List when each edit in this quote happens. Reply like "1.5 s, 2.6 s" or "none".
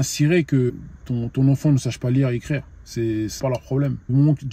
0.7 s, 3.3 s

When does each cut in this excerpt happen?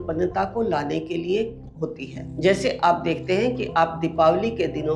2.1 s

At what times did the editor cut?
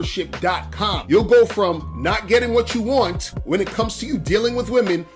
1.0 s

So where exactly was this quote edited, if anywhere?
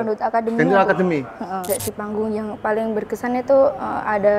1.6 s

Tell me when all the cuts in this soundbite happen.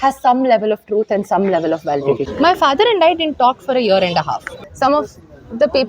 2.2 s, 4.5 s

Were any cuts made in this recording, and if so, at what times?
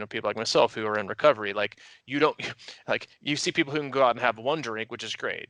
none

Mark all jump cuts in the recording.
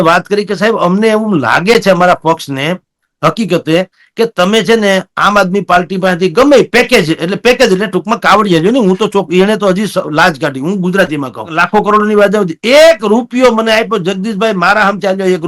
11.6 s

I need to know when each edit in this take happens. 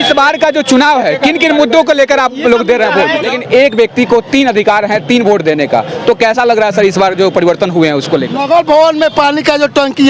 3.3 s, 8.4 s

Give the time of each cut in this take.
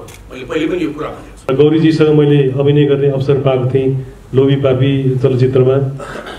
1.5 s

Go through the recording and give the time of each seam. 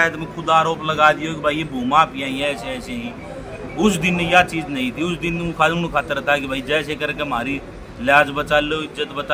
none

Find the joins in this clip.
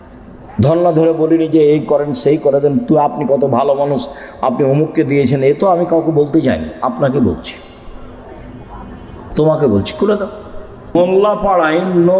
10.9 s

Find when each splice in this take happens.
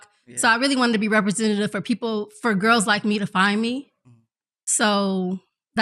none

